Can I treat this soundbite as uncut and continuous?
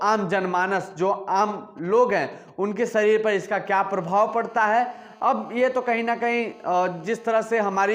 yes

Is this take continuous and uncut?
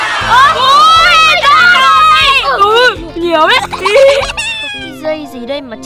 no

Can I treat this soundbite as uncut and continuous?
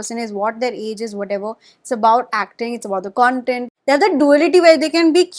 no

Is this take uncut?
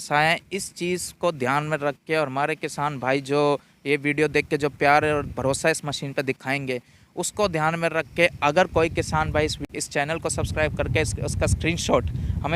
no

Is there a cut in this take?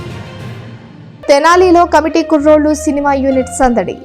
yes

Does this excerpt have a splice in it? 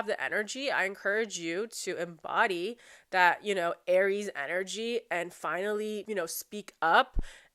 yes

